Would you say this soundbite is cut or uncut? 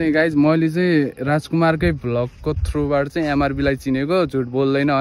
uncut